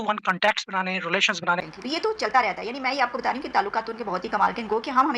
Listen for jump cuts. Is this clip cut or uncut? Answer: cut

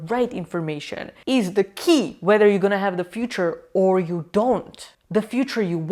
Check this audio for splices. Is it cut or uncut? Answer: uncut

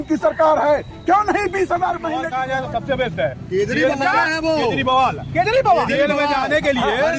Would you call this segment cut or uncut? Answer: cut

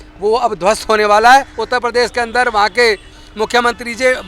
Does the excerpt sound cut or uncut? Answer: cut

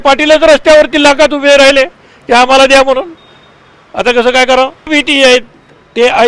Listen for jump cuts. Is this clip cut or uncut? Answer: cut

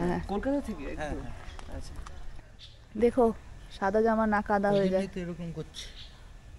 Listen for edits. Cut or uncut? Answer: uncut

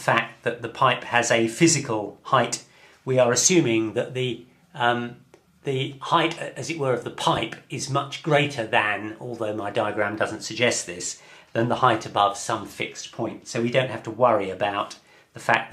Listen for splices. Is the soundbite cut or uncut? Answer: uncut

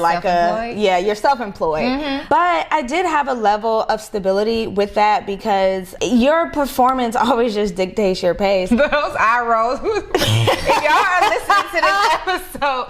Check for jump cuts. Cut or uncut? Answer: cut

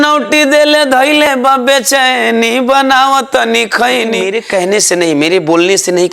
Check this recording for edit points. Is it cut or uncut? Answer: cut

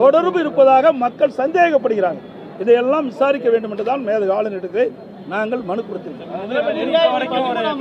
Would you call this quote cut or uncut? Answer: uncut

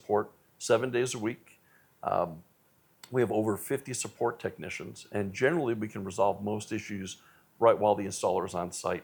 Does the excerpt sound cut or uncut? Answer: uncut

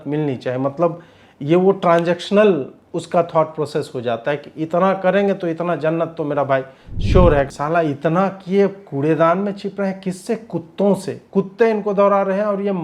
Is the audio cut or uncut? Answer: cut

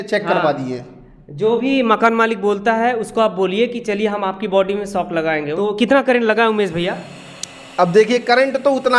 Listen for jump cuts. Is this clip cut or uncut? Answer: cut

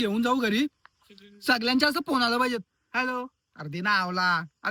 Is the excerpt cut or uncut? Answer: uncut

